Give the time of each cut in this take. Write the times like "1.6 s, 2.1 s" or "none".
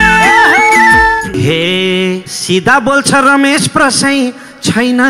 1.3 s